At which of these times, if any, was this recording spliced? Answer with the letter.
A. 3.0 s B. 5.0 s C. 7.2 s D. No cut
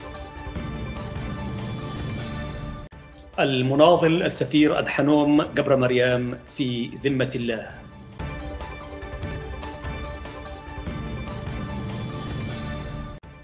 A